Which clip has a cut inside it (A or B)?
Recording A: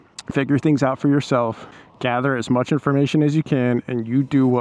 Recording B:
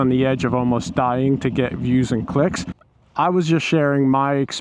B